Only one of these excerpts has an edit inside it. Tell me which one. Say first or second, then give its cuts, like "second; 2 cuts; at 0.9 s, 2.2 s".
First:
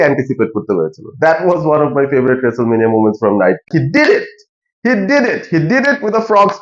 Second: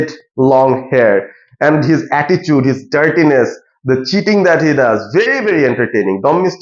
first; 1 cut; at 3.7 s